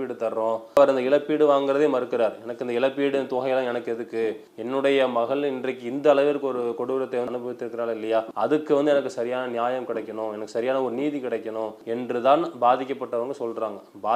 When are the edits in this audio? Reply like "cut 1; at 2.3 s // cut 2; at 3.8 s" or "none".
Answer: cut 1; at 0.8 s // cut 2; at 4.5 s // cut 3; at 11.8 s